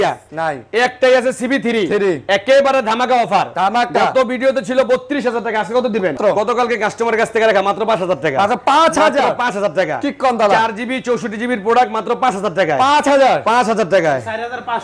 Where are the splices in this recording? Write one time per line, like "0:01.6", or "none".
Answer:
0:06.2